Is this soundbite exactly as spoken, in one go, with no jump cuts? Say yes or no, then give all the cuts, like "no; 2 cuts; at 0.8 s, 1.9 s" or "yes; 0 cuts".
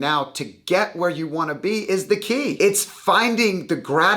no; 1 cut; at 2.5 s